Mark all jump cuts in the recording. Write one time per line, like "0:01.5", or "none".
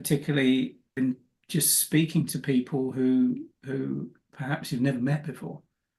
0:01.0

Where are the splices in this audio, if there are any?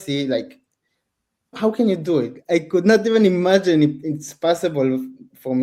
0:01.6
0:02.3

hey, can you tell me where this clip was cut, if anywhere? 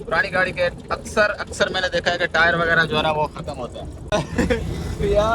0:04.1

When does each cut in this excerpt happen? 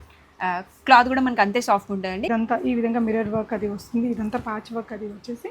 0:02.3

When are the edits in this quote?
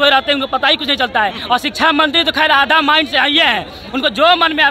none

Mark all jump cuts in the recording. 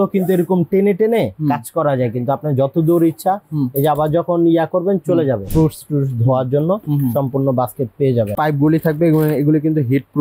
0:05.5
0:08.3

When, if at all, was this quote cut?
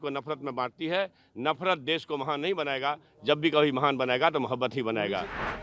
none

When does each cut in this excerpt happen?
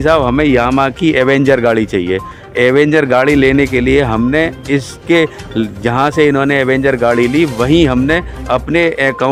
none

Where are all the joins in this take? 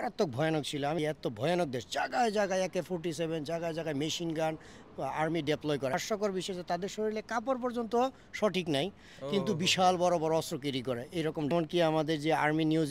0:01.0
0:05.9
0:11.5

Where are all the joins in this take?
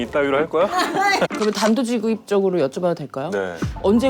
0:00.9

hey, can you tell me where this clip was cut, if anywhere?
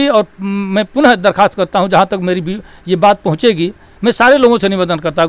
none

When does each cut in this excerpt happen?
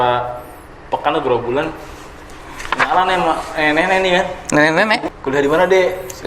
0:05.1

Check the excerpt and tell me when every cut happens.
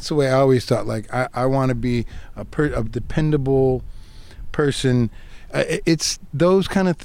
0:05.4

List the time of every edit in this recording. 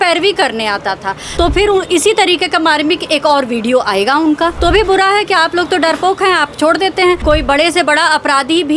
0:01.2
0:04.6
0:07.2

